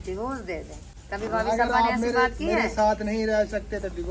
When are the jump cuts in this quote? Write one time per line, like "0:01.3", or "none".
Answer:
none

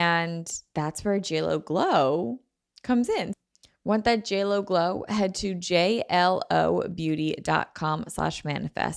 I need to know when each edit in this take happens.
0:03.3

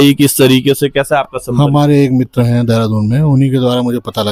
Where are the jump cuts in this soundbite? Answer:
none

